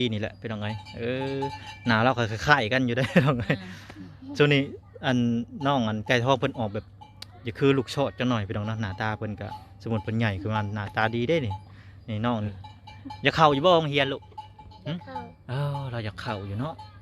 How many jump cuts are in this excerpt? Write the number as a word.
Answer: one